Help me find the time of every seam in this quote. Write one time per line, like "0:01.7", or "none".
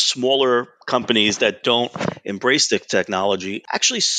none